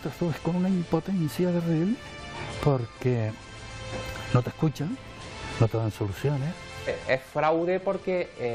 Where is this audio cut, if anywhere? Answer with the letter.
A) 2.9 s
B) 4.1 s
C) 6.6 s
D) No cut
C